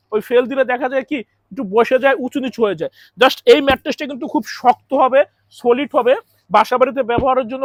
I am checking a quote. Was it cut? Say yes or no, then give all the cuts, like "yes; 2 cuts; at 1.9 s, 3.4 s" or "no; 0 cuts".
no; 0 cuts